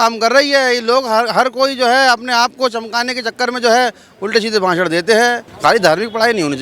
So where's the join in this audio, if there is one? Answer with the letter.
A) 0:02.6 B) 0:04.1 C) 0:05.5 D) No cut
C